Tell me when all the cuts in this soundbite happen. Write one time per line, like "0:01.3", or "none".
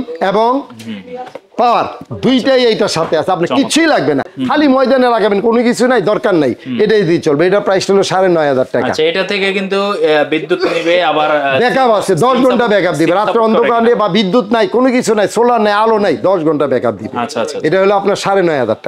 none

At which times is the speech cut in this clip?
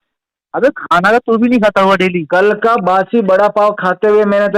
none

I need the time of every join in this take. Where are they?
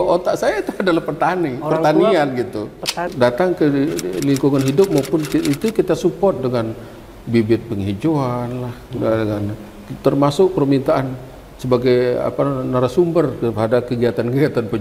0:03.1

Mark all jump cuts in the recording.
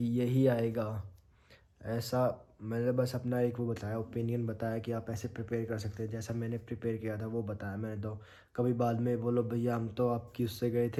none

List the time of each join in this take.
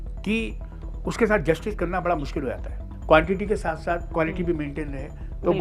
0:02.9

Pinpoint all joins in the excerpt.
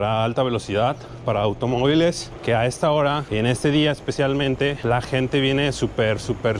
0:02.3
0:03.2
0:04.8

